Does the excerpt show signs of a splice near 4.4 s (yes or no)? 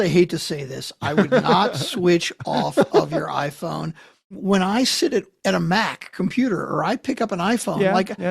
yes